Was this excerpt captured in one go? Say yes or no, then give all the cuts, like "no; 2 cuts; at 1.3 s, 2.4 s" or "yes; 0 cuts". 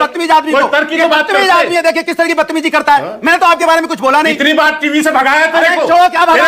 yes; 0 cuts